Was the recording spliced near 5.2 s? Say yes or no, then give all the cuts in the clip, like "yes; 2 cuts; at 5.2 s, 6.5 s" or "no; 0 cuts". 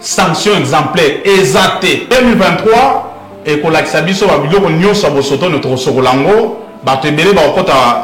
no; 1 cut; at 2.0 s